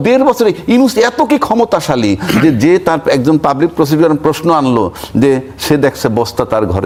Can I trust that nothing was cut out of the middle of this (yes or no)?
yes